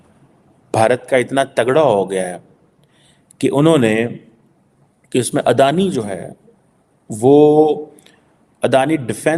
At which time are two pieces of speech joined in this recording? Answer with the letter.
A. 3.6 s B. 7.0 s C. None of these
C